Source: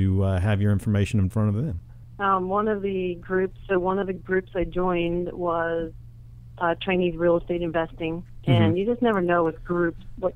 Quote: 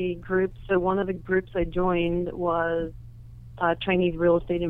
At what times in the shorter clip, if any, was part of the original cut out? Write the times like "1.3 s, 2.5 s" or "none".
none